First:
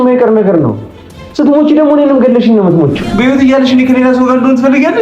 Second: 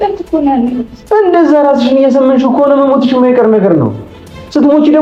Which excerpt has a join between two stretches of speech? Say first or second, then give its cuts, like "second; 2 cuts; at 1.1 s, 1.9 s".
first; 1 cut; at 3.0 s